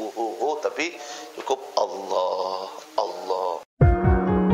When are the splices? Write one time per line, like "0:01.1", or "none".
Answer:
0:03.6